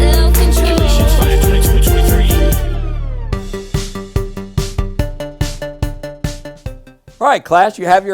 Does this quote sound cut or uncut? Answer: cut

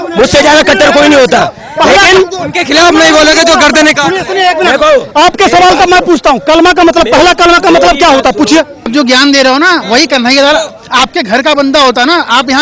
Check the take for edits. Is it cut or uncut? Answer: cut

